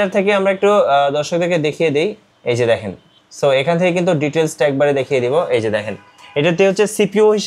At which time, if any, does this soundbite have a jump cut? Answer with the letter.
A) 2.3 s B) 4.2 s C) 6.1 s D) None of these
A